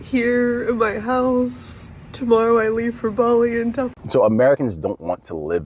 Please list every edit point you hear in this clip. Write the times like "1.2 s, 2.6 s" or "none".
3.9 s